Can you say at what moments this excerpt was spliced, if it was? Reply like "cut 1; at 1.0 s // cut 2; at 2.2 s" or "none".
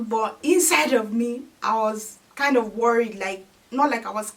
none